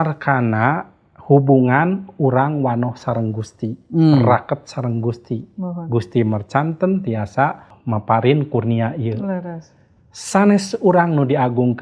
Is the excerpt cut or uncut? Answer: cut